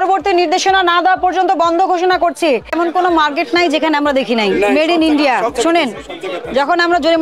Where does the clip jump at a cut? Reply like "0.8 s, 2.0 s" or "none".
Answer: 2.7 s